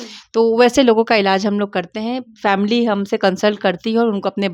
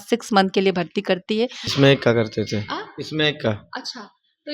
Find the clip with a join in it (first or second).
second